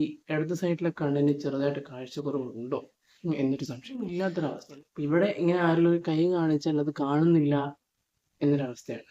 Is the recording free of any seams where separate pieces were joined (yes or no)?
no